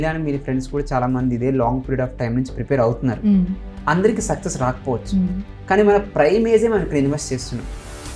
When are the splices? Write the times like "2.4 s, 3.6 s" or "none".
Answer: none